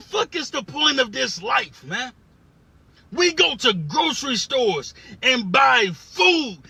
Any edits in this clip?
no; 0 cuts

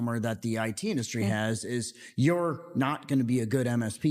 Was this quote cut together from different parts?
no; 0 cuts

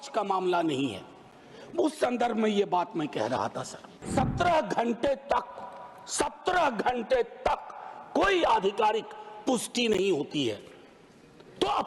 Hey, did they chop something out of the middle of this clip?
yes; 1 cut; at 4.1 s

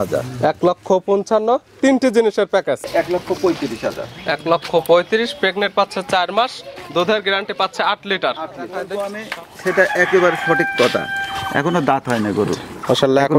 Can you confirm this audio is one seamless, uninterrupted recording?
no; 2 cuts; at 2.9 s, 8.8 s

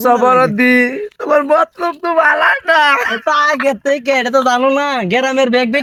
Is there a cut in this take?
no; 0 cuts

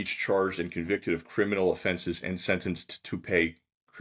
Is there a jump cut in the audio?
no; 0 cuts

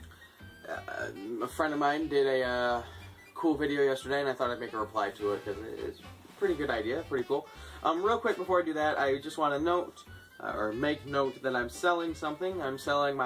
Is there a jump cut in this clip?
no; 0 cuts

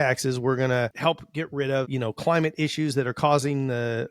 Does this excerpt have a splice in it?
yes; 1 cut; at 0.9 s

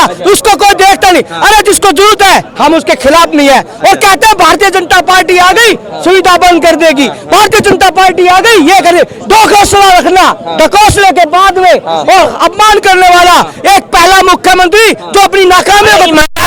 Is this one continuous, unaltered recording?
yes; 0 cuts

